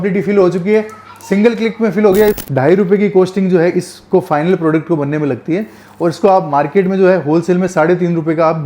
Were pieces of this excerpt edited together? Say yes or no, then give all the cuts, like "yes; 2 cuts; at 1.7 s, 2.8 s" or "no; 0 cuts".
yes; 1 cut; at 2.4 s